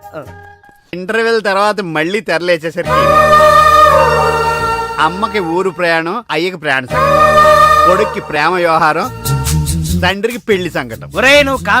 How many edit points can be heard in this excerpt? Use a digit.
1